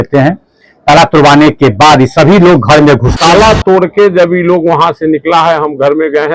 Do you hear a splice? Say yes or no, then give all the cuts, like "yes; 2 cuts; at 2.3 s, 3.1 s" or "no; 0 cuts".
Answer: yes; 1 cut; at 3.1 s